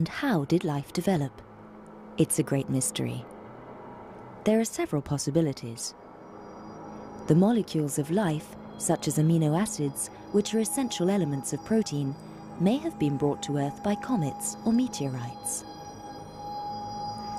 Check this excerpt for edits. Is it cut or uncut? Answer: uncut